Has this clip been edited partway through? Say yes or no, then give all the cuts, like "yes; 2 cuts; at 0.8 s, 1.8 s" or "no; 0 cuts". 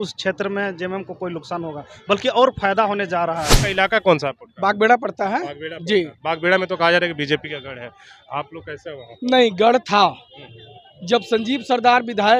yes; 1 cut; at 3.6 s